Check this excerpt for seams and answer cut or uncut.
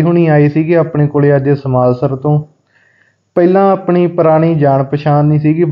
cut